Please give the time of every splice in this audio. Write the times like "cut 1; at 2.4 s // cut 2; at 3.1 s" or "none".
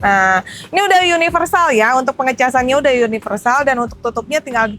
none